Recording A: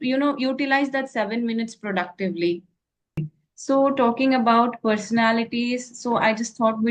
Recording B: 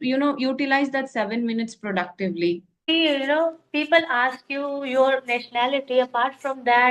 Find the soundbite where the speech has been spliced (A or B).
A